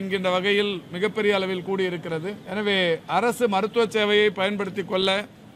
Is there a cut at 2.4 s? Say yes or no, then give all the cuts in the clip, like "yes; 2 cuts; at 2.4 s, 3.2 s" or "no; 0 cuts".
yes; 1 cut; at 2.4 s